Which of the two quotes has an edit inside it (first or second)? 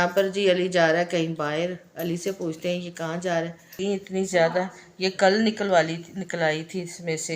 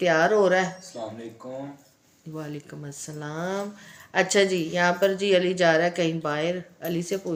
first